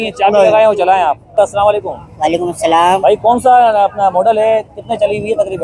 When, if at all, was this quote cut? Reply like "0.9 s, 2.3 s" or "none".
1.4 s